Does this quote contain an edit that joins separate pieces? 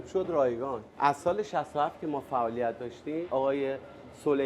yes; 2 cuts; at 0.9 s, 3.3 s

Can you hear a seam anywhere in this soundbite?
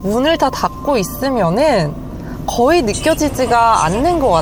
no; 0 cuts

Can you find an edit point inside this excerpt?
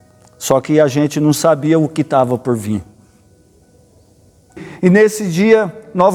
yes; 1 cut; at 4.7 s

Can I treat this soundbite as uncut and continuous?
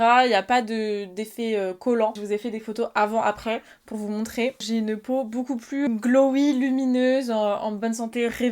no; 3 cuts; at 2.1 s, 4.6 s, 5.9 s

